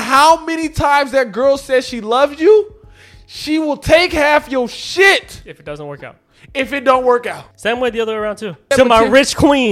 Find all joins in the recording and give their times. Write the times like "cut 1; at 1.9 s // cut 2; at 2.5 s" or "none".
cut 1; at 7.5 s // cut 2; at 8.7 s